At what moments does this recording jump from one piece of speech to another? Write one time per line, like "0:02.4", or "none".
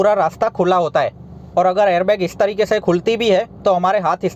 none